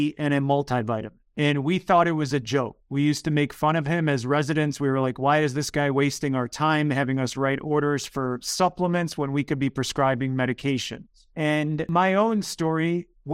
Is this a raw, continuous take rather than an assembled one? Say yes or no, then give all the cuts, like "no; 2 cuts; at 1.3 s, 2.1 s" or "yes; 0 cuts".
no; 1 cut; at 11.9 s